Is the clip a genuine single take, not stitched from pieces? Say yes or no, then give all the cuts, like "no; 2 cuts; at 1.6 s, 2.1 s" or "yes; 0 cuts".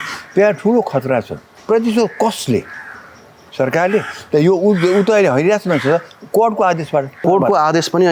no; 2 cuts; at 1.5 s, 7.2 s